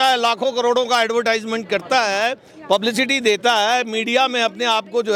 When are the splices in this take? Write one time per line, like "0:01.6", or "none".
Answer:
none